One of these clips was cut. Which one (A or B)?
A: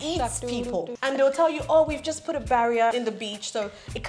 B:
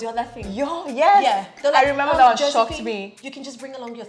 A